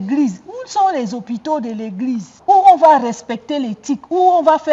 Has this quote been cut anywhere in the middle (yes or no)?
yes